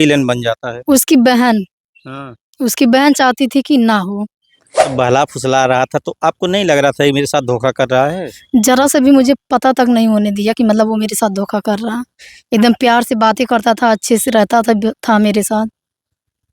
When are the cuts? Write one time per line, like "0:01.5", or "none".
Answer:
0:04.9